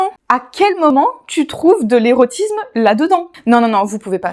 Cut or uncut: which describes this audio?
cut